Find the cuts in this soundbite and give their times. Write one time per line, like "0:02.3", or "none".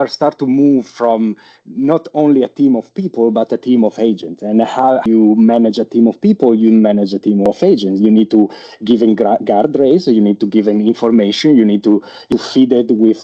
0:05.0
0:07.5
0:12.3